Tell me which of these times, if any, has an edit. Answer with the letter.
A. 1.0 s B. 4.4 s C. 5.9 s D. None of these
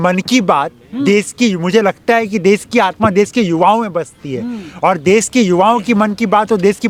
D